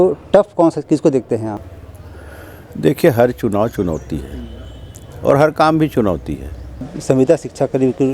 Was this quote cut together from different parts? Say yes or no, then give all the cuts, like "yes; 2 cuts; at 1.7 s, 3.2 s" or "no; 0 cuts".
yes; 1 cut; at 6.9 s